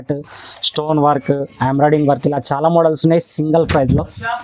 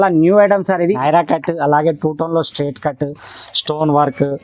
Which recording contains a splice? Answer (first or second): second